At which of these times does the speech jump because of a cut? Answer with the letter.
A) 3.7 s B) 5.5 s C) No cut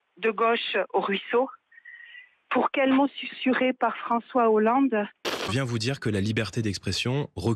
B